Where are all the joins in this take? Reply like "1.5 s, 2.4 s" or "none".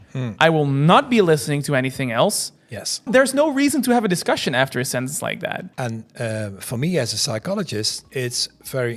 3.1 s, 5.7 s, 8.0 s